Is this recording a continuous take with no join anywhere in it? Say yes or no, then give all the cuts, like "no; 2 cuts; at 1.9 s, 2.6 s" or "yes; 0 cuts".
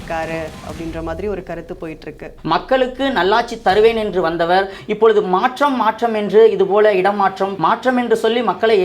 no; 2 cuts; at 2.4 s, 7.5 s